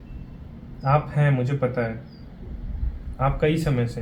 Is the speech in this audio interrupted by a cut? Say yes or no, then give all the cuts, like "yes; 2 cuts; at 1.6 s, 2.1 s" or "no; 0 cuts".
no; 0 cuts